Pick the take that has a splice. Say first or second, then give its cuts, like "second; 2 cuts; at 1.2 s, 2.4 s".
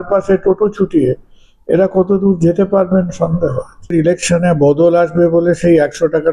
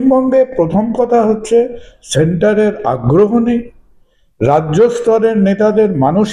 first; 1 cut; at 3.9 s